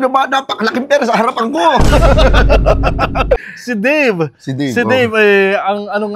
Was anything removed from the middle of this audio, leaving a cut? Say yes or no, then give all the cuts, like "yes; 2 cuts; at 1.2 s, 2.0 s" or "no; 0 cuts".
yes; 1 cut; at 3.5 s